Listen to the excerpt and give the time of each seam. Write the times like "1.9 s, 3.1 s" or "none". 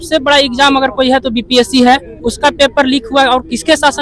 none